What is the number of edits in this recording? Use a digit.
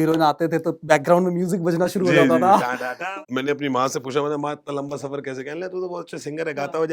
1